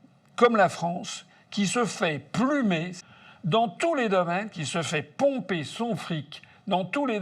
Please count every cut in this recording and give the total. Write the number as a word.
one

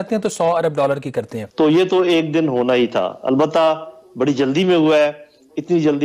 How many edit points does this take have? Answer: one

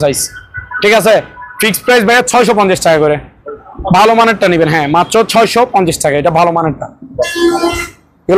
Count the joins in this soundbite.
zero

